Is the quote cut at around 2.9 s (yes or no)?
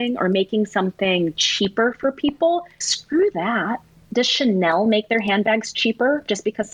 yes